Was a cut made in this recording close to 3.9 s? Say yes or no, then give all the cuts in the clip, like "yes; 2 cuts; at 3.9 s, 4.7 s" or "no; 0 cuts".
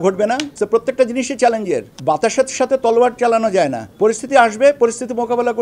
no; 1 cut; at 1.9 s